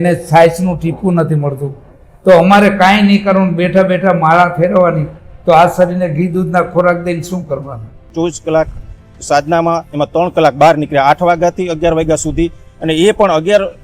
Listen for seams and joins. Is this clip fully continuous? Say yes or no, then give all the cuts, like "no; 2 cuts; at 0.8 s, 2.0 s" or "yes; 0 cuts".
no; 1 cut; at 8.0 s